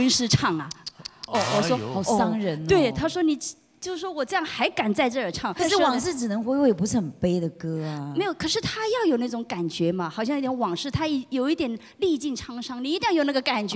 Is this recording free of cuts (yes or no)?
no